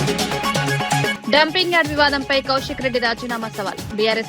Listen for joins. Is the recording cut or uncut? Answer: cut